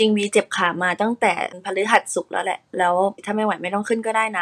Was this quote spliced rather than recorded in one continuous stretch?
yes; 2 cuts; at 1.5 s, 3.2 s

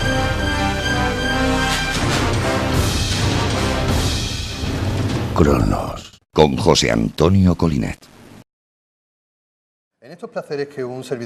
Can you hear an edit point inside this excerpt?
yes; 1 cut; at 4.2 s

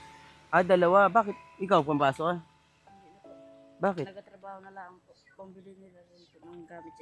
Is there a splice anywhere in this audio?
no; 0 cuts

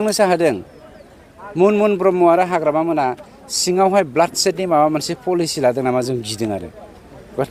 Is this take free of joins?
yes; 0 cuts

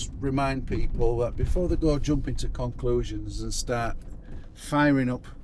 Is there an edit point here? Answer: no; 0 cuts

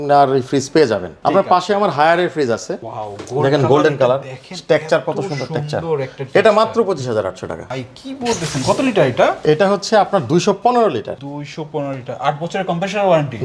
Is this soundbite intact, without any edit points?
yes; 0 cuts

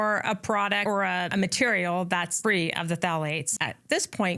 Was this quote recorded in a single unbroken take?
no; 3 cuts; at 1.0 s, 2.3 s, 3.4 s

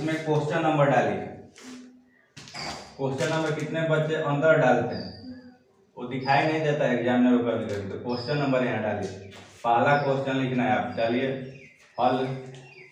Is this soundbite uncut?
yes; 0 cuts

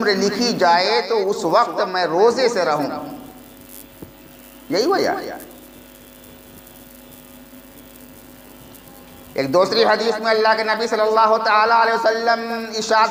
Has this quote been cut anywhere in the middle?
no; 0 cuts

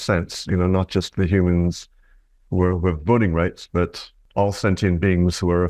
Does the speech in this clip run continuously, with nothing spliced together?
no; 1 cut; at 4.2 s

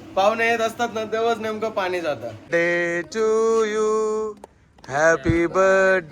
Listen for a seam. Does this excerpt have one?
yes; 1 cut; at 2.5 s

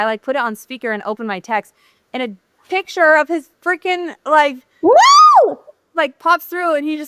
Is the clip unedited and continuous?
yes; 0 cuts

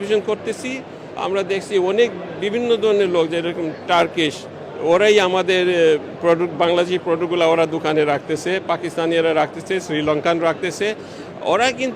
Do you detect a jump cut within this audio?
no; 0 cuts

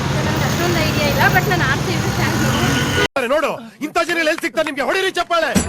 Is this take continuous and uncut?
no; 2 cuts; at 1.5 s, 3.1 s

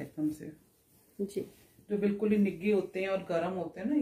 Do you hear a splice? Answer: no; 0 cuts

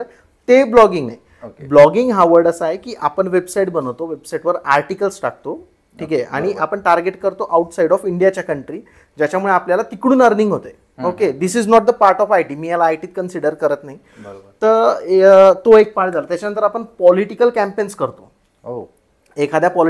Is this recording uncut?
yes; 0 cuts

